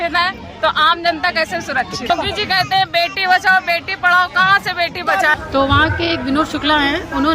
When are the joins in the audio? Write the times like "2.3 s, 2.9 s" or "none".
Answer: 2.1 s, 5.3 s